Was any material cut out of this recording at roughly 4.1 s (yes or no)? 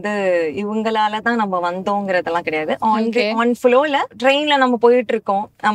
yes